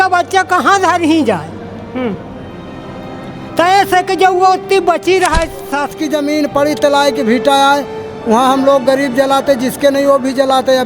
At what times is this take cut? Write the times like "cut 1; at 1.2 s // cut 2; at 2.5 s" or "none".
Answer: cut 1; at 5.9 s